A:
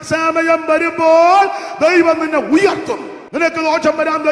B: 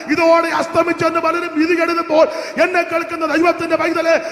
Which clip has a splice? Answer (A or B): A